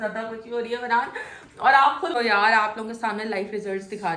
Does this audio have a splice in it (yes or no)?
yes